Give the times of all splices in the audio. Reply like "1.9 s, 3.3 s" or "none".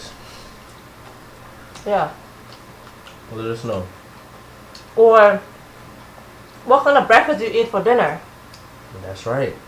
none